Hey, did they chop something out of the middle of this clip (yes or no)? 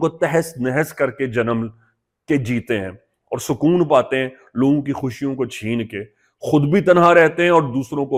no